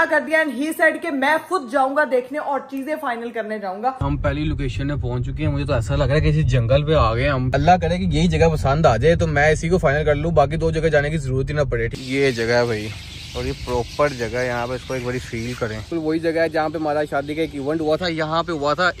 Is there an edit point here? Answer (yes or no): yes